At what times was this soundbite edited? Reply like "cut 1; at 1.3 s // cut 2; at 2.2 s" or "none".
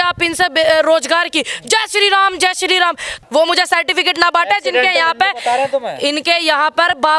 cut 1; at 3.1 s